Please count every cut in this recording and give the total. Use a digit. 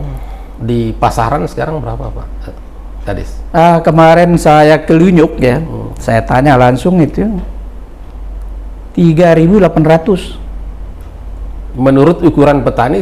0